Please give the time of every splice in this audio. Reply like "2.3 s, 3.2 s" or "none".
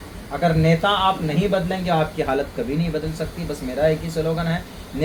none